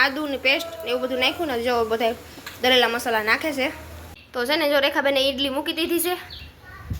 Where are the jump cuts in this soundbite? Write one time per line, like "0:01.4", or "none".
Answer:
0:04.2